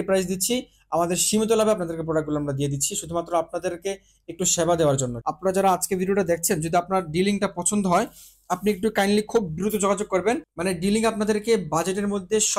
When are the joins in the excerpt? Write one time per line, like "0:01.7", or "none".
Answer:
0:05.1
0:10.5